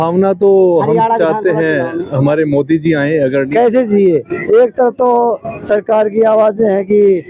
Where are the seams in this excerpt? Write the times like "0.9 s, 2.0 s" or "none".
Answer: 3.5 s